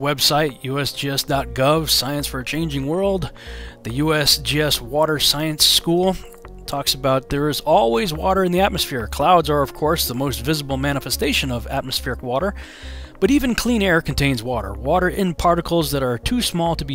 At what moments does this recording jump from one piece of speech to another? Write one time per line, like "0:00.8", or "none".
0:10.0